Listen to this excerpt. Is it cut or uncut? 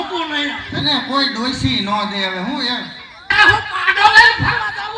cut